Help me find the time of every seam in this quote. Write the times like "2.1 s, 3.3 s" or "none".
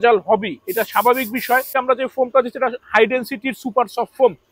1.7 s

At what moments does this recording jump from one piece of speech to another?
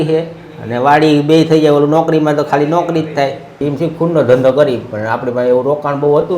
3.7 s

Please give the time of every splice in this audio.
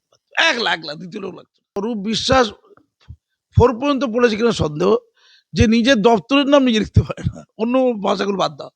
1.8 s

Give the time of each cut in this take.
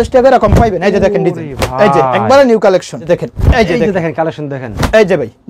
3.0 s

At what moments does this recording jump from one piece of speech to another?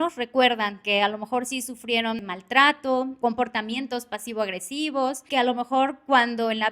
2.2 s, 3.1 s, 5.2 s

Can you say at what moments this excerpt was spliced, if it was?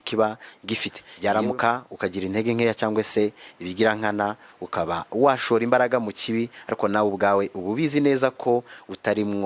1.0 s

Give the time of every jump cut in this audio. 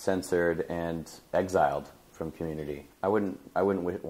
2.9 s

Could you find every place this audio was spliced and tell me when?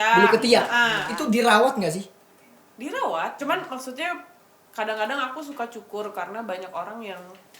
1.1 s, 3.3 s

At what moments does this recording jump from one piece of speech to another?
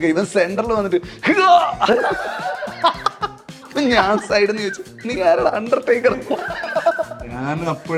none

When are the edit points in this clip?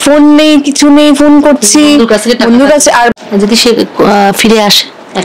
3.2 s

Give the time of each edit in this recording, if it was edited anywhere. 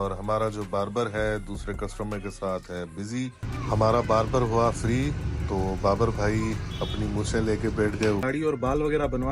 3.4 s, 8.2 s

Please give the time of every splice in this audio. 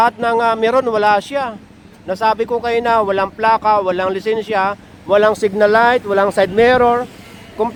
none

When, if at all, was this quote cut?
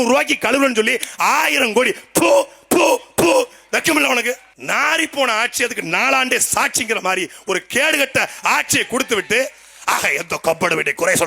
4.5 s

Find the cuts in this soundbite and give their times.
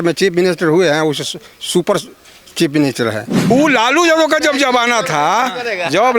3.3 s

